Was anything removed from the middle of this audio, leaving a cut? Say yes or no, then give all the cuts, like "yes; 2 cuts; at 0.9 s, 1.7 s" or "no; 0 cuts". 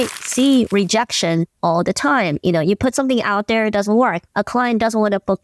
no; 0 cuts